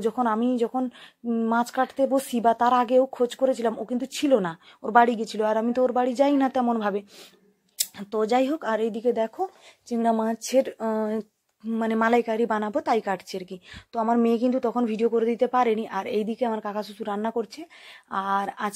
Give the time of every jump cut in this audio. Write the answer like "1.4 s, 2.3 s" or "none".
none